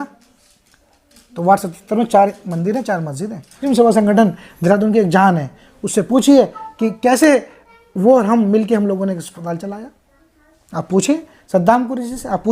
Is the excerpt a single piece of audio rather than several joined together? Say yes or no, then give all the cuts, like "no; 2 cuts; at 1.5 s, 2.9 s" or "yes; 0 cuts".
no; 1 cut; at 3.6 s